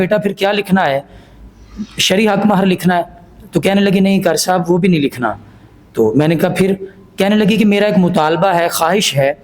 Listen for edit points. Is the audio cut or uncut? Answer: uncut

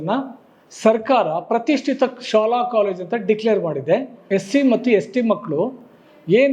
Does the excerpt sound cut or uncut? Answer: cut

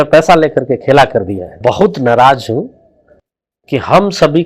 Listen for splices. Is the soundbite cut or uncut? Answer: cut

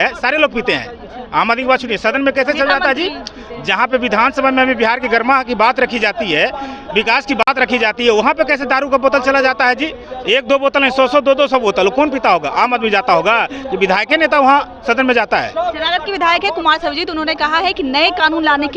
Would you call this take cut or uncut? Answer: uncut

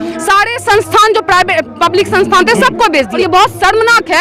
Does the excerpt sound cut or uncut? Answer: cut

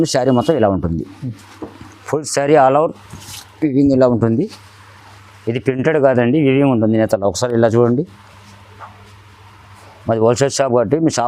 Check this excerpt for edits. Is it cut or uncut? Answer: uncut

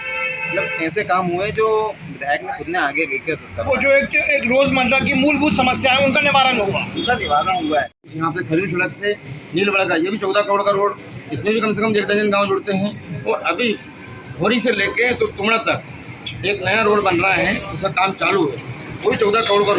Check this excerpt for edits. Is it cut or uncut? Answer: cut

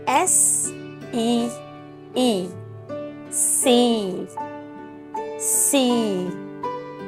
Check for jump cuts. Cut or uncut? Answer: uncut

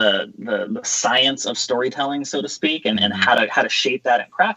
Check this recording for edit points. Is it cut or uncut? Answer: uncut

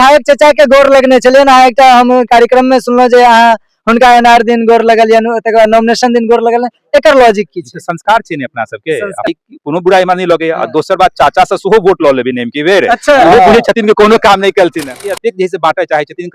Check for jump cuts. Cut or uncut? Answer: cut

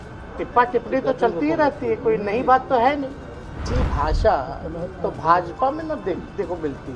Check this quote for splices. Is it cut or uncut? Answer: cut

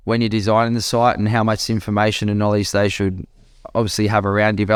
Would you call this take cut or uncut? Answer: uncut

